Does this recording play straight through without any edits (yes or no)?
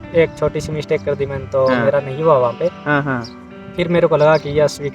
yes